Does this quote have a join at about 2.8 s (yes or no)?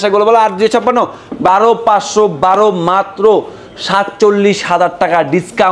no